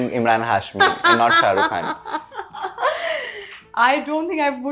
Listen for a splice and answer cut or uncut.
uncut